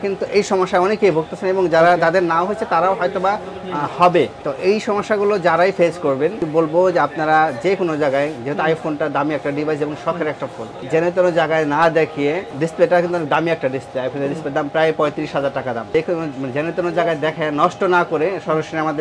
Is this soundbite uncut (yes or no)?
no